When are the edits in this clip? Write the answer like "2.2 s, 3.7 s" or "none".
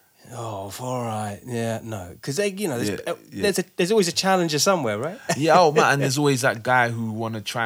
none